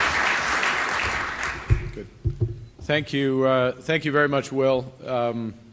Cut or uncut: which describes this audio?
uncut